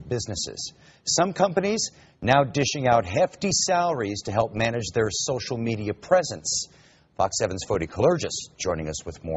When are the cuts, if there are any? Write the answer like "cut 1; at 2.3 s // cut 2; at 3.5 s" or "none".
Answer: none